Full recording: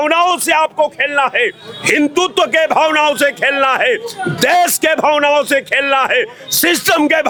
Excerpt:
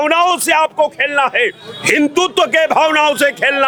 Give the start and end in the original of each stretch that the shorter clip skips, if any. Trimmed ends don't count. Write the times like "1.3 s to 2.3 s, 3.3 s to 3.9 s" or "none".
none